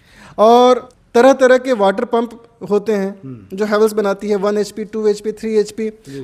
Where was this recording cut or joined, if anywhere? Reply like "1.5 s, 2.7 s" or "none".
0.9 s